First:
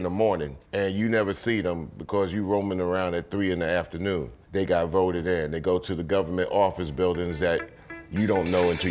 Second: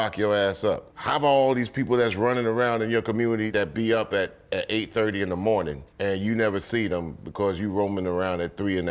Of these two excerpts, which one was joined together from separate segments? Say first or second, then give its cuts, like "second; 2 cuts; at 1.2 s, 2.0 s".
second; 2 cuts; at 0.9 s, 3.5 s